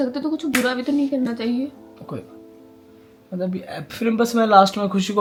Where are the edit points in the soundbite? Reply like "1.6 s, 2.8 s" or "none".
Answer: none